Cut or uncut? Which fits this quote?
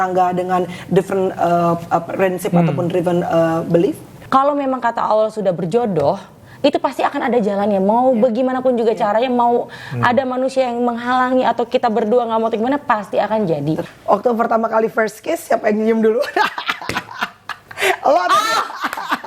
cut